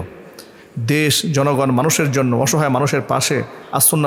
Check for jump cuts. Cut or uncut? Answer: uncut